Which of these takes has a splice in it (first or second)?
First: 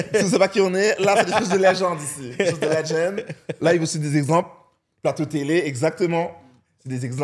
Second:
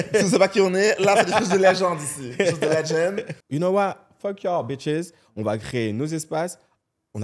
second